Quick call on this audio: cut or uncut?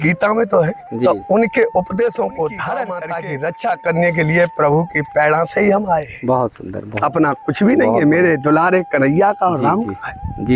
cut